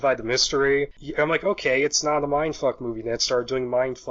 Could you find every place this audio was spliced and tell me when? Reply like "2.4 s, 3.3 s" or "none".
1.0 s